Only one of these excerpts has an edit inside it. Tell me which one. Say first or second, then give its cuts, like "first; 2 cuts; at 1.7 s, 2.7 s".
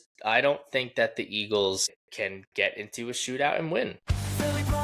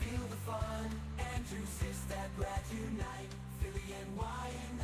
first; 2 cuts; at 2.0 s, 4.0 s